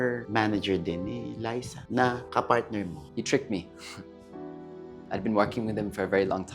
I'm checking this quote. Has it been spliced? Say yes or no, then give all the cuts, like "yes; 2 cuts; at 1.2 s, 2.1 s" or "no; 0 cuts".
yes; 1 cut; at 3.0 s